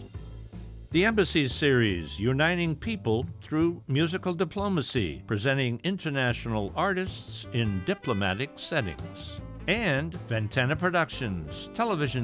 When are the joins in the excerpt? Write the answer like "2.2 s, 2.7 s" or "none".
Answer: 5.2 s, 10.2 s